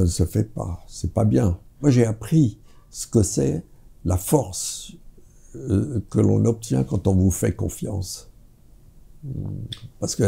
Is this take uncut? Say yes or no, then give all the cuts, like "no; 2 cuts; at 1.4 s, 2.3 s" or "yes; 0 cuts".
no; 1 cut; at 1.7 s